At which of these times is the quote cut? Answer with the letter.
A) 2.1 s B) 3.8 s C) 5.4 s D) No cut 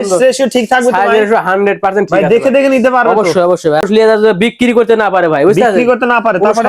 B